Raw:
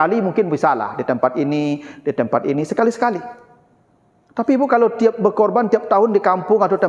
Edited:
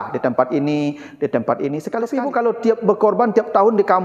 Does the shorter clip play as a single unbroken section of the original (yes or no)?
no